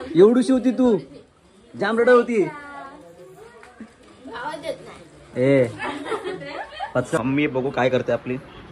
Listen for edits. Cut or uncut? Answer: cut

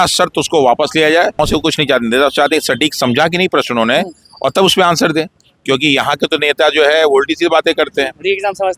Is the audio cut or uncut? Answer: cut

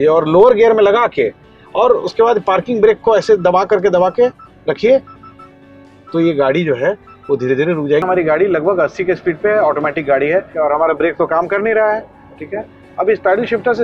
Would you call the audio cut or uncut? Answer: cut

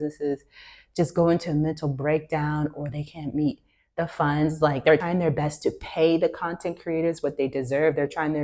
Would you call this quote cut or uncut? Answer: cut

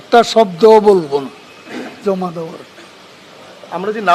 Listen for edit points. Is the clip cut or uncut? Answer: uncut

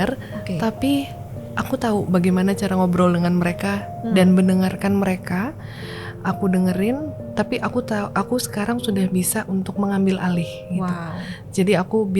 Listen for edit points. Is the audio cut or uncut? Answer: uncut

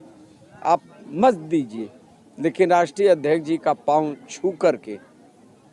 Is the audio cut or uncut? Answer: uncut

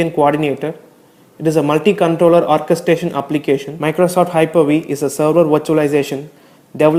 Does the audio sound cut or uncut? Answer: uncut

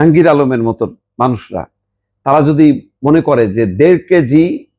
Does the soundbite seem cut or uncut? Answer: uncut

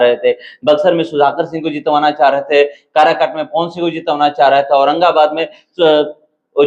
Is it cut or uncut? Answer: uncut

